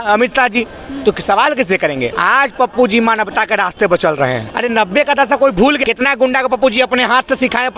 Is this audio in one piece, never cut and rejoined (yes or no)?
no